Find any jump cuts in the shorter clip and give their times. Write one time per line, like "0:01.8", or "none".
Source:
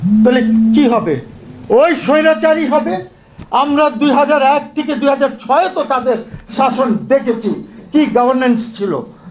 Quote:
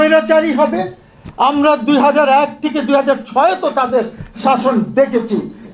none